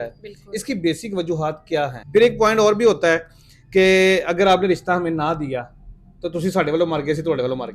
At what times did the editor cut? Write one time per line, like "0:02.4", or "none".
0:02.0